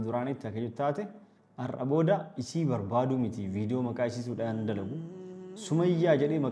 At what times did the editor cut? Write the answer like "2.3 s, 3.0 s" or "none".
none